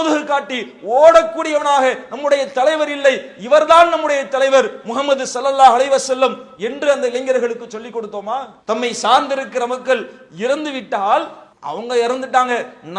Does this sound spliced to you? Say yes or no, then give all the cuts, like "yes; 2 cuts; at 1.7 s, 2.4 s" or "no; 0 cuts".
no; 0 cuts